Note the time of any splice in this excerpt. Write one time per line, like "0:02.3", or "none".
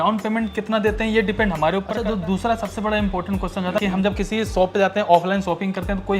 0:01.9
0:03.8